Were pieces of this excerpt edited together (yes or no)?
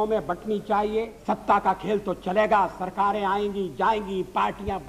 yes